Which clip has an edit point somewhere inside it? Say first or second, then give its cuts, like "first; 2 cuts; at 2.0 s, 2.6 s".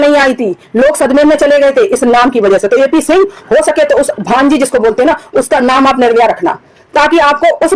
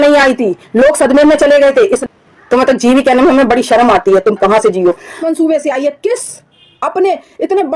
second; 2 cuts; at 2.0 s, 5.2 s